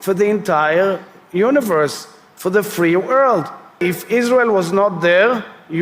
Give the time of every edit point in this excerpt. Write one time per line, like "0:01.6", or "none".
0:03.8